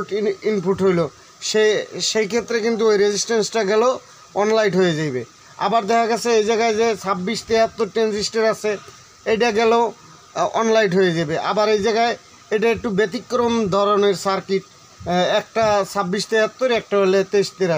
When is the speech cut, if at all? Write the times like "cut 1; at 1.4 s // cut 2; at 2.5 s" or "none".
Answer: none